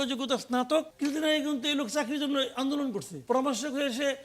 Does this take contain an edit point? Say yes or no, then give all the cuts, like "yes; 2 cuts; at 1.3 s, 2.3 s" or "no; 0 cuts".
yes; 2 cuts; at 0.9 s, 3.1 s